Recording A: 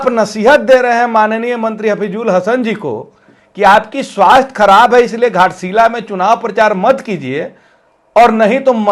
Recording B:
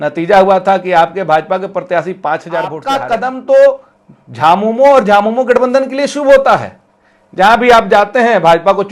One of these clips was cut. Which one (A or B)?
B